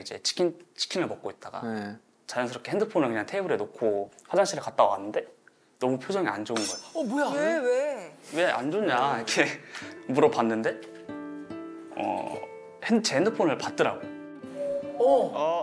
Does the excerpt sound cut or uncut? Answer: uncut